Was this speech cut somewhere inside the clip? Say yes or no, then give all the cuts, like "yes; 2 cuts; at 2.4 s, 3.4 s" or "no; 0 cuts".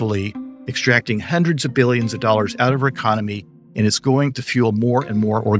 no; 0 cuts